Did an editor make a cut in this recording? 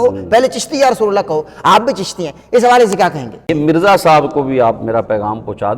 yes; 1 cut; at 3.3 s

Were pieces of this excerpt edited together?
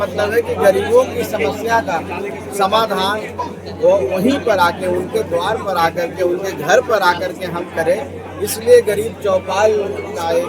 no; 0 cuts

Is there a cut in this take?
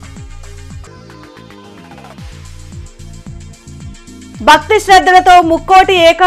yes; 1 cut; at 2.8 s

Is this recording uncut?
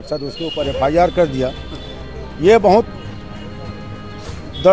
yes; 0 cuts

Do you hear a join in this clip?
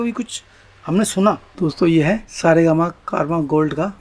yes; 1 cut; at 1.6 s

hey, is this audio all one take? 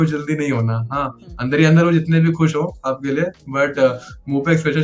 yes; 0 cuts

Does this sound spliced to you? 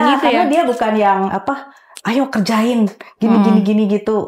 no; 0 cuts

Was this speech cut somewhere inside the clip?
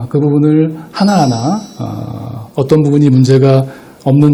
no; 0 cuts

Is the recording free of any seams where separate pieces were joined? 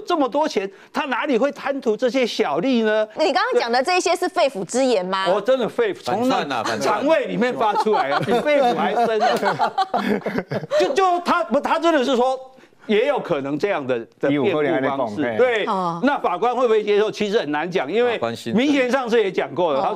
yes; 0 cuts

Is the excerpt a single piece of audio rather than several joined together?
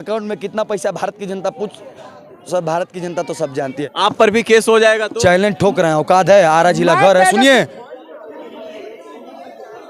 no; 1 cut; at 3.9 s

